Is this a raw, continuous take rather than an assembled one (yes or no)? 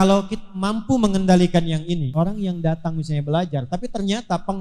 no